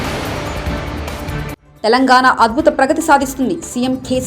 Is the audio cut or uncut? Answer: cut